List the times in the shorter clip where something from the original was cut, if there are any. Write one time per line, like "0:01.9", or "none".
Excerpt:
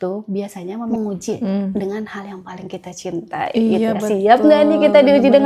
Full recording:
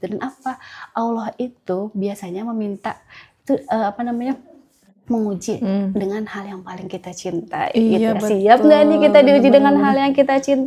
0:00.9